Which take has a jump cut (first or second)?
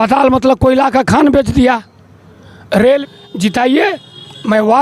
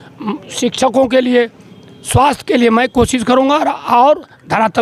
first